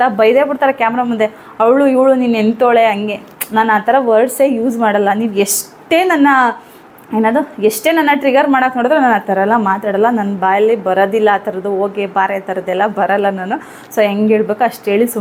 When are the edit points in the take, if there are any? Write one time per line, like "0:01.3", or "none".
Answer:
none